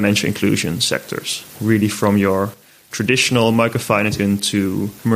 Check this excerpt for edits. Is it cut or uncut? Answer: cut